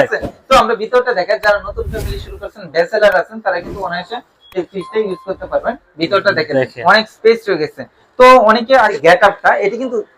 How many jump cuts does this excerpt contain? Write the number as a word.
one